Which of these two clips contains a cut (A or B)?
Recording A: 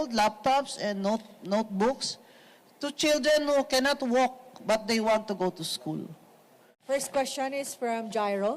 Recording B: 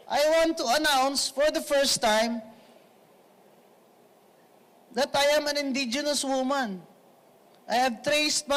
A